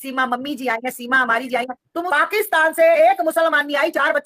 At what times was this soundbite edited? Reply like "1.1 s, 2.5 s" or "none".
2.1 s